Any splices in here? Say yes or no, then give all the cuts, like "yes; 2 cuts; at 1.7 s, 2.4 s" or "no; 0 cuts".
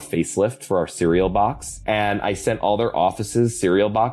yes; 1 cut; at 1.7 s